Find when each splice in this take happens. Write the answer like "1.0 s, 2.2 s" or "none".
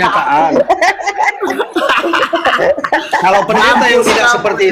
1.0 s

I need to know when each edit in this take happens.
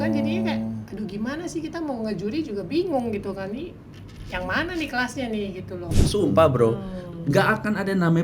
6.0 s

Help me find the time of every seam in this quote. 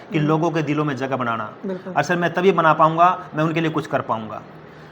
none

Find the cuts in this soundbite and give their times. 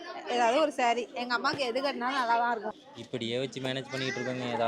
2.8 s

